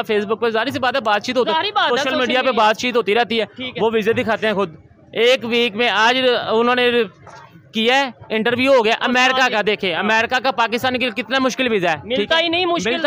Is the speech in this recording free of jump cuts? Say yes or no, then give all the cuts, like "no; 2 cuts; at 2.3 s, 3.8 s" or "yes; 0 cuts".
yes; 0 cuts